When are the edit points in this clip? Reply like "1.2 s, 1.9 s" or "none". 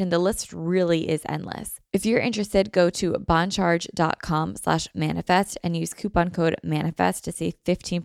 1.7 s